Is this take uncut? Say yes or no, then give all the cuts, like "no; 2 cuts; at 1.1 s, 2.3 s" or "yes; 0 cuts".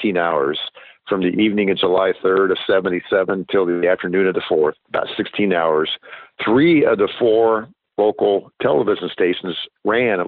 no; 2 cuts; at 4.8 s, 6.3 s